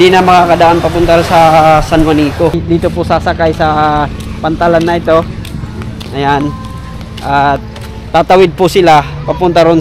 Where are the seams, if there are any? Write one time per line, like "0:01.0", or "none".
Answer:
0:02.5